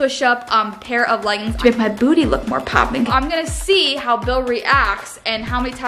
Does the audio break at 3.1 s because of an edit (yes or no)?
yes